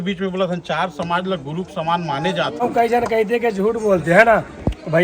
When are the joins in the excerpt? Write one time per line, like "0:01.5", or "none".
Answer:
0:02.5